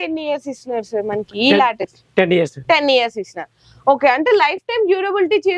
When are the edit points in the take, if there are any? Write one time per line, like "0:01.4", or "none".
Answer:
none